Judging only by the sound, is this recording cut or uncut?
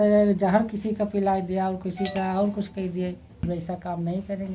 cut